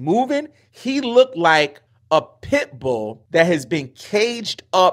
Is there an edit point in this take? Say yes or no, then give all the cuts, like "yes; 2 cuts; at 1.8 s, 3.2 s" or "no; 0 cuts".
yes; 2 cuts; at 1.9 s, 3.2 s